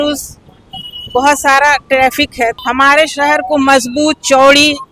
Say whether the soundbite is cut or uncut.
cut